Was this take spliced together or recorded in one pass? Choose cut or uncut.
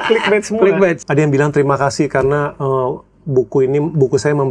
cut